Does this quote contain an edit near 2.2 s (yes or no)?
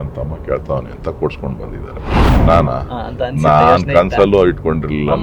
yes